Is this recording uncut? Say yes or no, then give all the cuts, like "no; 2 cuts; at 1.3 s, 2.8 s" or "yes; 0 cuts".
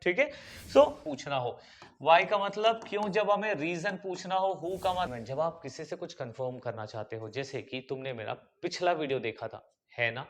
no; 2 cuts; at 1.0 s, 5.1 s